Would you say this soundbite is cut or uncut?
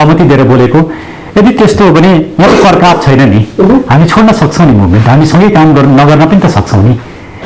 uncut